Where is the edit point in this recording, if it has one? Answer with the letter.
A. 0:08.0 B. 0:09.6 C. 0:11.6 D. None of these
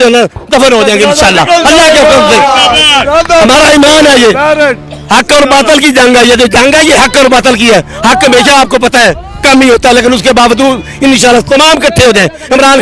D